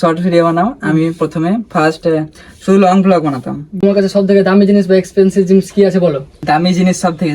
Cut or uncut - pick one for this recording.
cut